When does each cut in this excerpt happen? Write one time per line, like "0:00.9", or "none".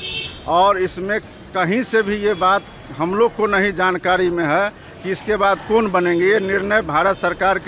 none